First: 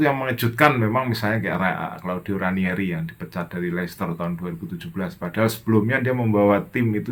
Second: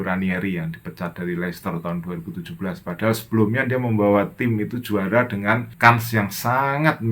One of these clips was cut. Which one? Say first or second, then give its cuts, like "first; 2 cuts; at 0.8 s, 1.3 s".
second; 1 cut; at 5.7 s